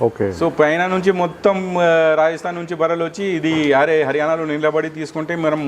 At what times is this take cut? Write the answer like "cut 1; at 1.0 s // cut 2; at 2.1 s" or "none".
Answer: none